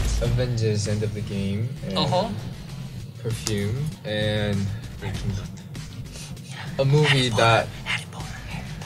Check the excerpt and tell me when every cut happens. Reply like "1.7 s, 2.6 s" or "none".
4.0 s, 4.9 s